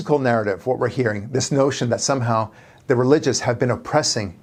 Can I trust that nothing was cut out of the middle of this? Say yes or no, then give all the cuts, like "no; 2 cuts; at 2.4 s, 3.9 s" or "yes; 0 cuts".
yes; 0 cuts